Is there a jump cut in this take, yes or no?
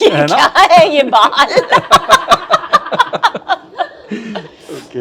no